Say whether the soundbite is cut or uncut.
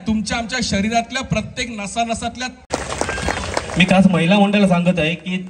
cut